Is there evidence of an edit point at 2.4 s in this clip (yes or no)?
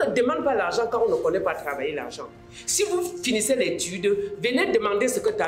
no